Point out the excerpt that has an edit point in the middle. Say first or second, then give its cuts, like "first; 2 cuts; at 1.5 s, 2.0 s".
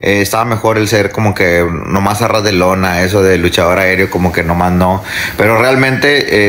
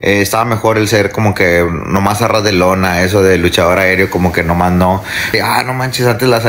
second; 1 cut; at 5.3 s